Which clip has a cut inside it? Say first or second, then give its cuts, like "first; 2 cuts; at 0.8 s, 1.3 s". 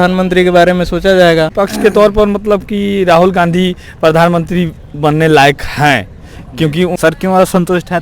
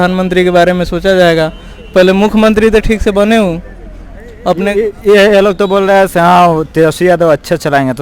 first; 2 cuts; at 1.6 s, 7.0 s